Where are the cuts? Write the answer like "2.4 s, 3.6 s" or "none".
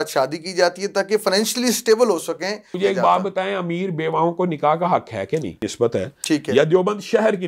2.7 s, 5.6 s